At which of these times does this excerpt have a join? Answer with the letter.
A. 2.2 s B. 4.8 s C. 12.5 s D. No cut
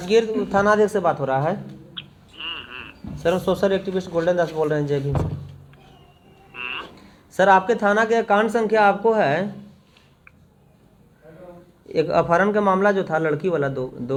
D